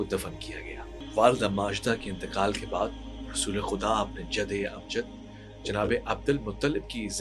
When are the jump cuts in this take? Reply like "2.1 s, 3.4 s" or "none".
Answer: 1.0 s